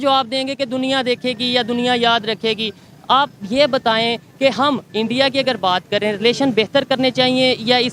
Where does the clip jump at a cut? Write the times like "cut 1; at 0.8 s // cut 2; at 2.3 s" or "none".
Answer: none